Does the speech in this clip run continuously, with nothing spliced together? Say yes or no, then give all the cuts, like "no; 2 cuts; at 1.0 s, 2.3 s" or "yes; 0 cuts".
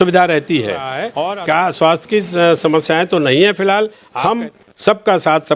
no; 2 cuts; at 1.1 s, 4.0 s